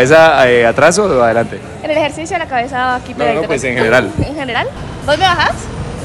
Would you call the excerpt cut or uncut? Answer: cut